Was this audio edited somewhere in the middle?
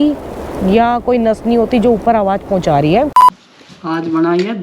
yes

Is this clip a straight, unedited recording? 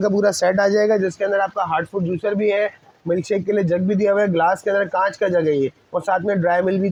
yes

